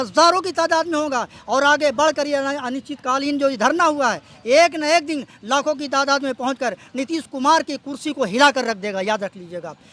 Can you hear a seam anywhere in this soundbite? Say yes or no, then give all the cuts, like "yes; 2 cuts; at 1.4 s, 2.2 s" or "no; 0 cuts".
no; 0 cuts